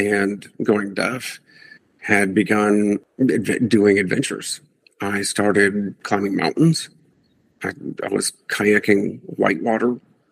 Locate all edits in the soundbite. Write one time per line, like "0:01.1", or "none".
0:03.1
0:06.0